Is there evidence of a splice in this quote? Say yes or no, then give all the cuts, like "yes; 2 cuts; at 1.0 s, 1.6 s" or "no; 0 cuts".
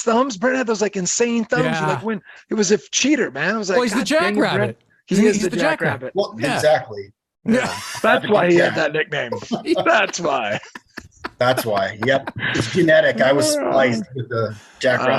no; 0 cuts